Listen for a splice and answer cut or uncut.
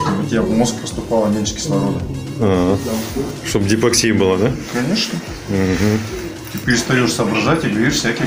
uncut